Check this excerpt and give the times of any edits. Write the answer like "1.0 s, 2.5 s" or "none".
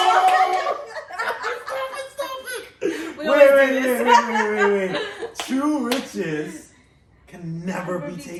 none

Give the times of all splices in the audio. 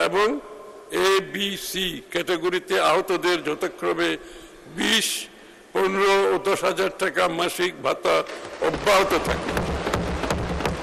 none

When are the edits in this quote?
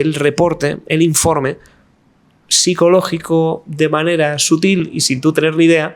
none

